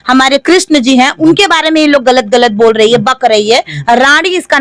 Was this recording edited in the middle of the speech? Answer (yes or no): no